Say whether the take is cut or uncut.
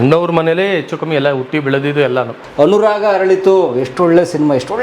cut